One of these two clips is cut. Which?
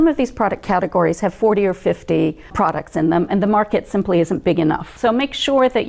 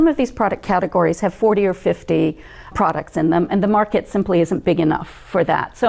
first; 2 cuts; at 2.4 s, 4.9 s

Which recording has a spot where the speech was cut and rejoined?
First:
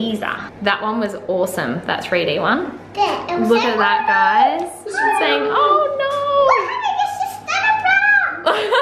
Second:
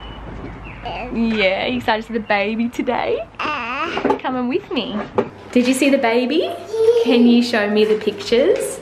second; 1 cut; at 5.3 s

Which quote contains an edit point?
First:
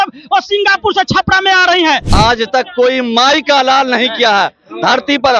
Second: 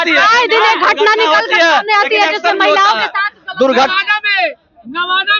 first; 1 cut; at 2.1 s

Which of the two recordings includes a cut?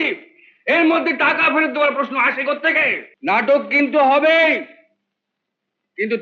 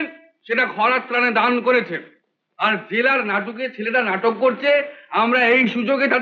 first; 1 cut; at 3.1 s

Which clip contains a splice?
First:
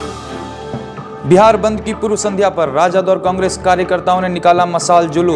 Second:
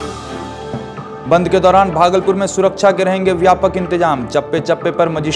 first; 1 cut; at 1.1 s

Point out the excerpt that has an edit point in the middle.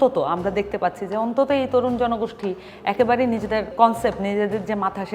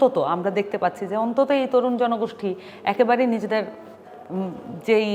first; 1 cut; at 3.7 s

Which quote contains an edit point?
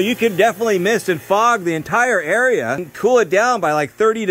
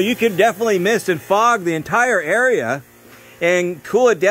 first; 1 cut; at 2.9 s

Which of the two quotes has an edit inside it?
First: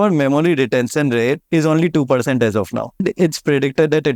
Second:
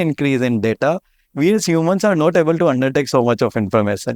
first; 2 cuts; at 1.4 s, 3.0 s

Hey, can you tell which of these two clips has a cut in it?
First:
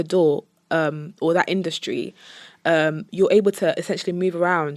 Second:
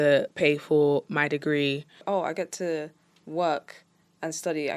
second; 1 cut; at 1.9 s

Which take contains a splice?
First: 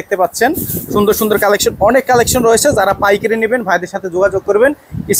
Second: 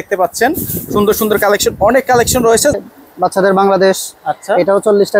second; 1 cut; at 2.7 s

